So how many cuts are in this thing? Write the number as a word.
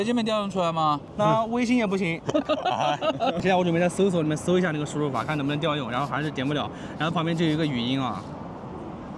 two